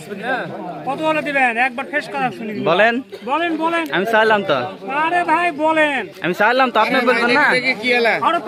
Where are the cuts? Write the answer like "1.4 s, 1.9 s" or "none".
none